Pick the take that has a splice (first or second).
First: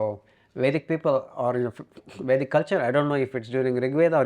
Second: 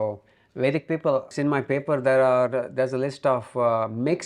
second